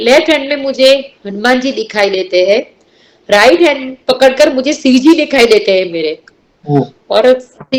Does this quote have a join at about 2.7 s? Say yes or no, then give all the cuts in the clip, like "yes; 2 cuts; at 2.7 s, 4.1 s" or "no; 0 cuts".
no; 0 cuts